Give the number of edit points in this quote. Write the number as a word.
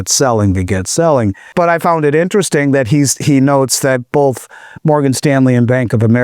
one